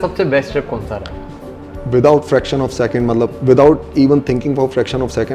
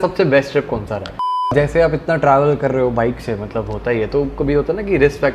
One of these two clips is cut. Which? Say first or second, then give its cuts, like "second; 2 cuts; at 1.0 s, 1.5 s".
second; 1 cut; at 1.5 s